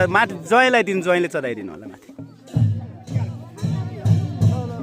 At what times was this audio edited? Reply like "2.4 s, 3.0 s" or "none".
3.4 s

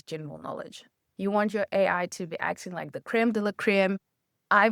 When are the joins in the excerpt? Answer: 1.0 s

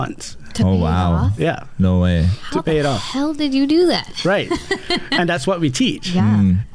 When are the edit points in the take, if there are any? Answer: none

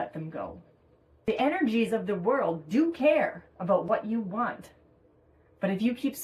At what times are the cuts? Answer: 1.4 s

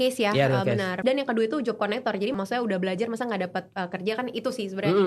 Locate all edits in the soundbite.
1.0 s, 2.3 s

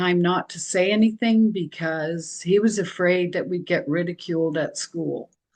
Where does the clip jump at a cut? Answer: none

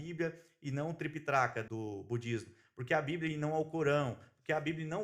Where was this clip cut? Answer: 1.6 s

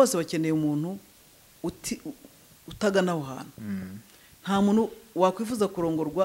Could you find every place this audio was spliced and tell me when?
none

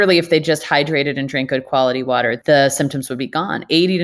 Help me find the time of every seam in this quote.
2.4 s

